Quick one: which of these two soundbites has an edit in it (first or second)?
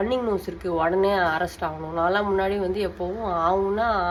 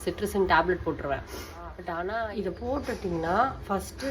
second